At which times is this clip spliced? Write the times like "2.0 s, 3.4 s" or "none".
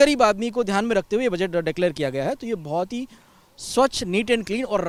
none